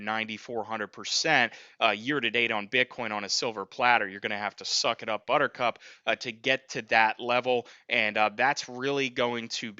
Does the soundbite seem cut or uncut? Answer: uncut